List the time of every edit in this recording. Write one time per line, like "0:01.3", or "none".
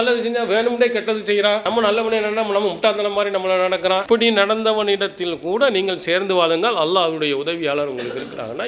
none